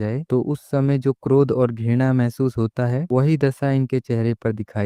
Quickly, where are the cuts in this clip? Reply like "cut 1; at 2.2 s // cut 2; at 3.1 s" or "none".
none